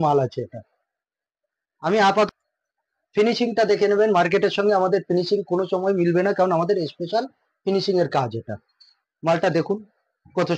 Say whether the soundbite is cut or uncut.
cut